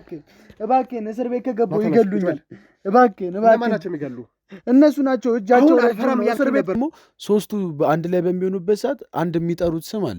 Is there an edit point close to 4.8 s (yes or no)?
no